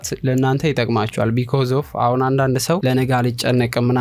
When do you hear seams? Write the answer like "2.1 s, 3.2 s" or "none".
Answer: 2.8 s